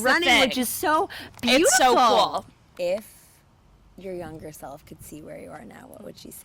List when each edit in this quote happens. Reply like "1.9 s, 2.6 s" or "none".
2.5 s